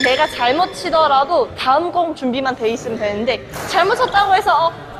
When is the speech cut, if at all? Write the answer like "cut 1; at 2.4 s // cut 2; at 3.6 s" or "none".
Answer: none